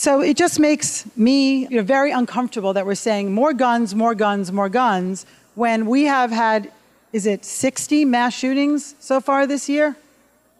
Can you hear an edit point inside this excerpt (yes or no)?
yes